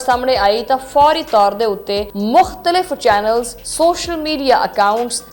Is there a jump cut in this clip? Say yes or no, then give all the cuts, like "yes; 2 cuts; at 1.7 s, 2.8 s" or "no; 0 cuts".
yes; 2 cuts; at 2.1 s, 3.6 s